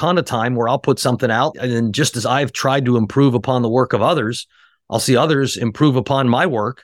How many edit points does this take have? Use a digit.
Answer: 1